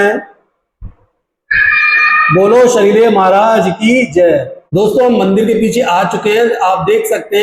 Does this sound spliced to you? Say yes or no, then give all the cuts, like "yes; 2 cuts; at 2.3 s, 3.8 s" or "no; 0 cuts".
yes; 1 cut; at 4.6 s